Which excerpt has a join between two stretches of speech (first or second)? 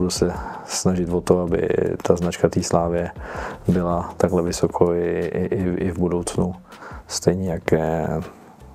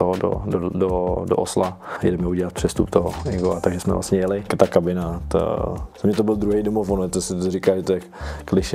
second